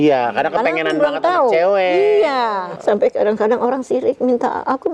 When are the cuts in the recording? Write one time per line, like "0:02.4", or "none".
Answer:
0:02.7